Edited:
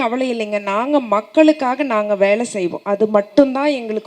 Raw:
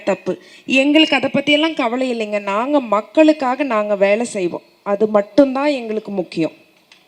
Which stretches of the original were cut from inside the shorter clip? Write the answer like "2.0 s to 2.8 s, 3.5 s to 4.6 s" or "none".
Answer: 4.6 s to 4.8 s